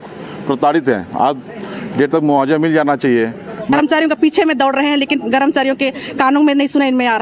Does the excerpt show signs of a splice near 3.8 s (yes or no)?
yes